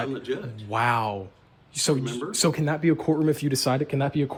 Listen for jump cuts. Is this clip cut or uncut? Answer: uncut